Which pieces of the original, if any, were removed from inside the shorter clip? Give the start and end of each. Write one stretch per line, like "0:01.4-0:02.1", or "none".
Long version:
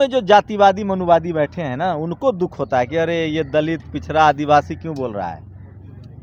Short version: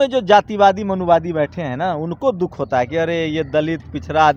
none